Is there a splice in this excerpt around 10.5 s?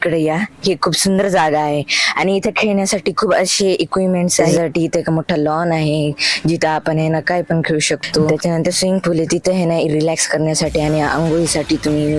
no; 2 cuts; at 4.4 s, 8.3 s

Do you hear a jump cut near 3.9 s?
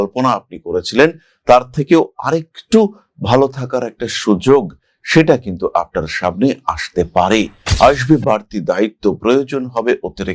no; 1 cut; at 7.6 s

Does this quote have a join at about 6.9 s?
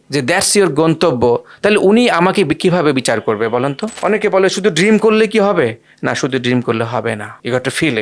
no; 1 cut; at 3.9 s

